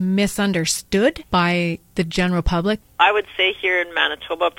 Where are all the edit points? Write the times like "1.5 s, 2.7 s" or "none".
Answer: 1.2 s, 2.9 s